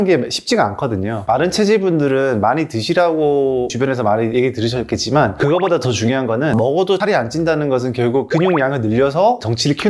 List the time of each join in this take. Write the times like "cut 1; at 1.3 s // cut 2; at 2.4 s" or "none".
cut 1; at 1.2 s